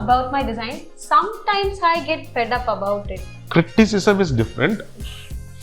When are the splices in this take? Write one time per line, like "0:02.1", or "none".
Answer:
0:03.3